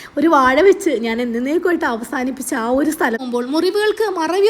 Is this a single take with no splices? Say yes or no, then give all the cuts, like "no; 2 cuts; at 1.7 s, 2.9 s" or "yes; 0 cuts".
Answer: no; 1 cut; at 3.2 s